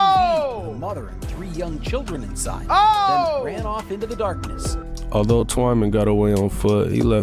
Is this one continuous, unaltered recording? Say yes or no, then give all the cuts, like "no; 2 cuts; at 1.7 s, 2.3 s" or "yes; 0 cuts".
yes; 0 cuts